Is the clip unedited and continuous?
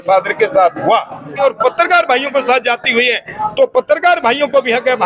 no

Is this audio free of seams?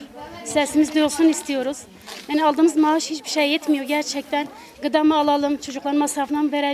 yes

